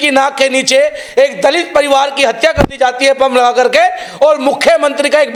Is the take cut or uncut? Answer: uncut